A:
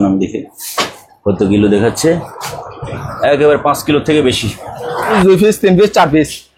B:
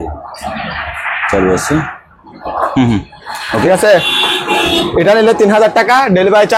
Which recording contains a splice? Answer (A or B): A